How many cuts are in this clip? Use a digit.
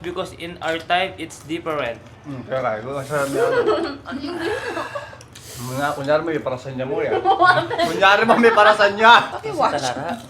1